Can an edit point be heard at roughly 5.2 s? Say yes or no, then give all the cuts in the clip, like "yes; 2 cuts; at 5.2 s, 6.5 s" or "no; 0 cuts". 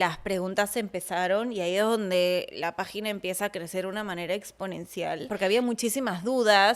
yes; 1 cut; at 5.2 s